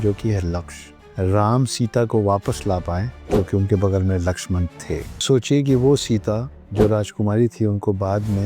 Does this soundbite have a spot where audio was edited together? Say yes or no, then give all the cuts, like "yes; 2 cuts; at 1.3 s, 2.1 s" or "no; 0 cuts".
yes; 3 cuts; at 1.0 s, 3.1 s, 5.2 s